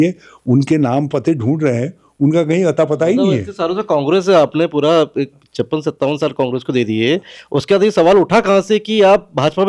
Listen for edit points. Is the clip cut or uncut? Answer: uncut